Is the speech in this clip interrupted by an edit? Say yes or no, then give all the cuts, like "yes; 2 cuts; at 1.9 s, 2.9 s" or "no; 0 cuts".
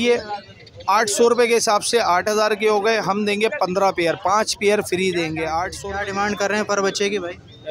yes; 1 cut; at 5.8 s